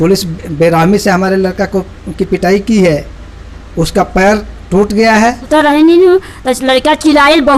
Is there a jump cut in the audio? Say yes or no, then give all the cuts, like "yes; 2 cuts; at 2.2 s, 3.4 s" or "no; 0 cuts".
yes; 1 cut; at 5.4 s